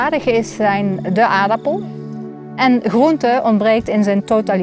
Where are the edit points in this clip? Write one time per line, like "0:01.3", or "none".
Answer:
0:02.0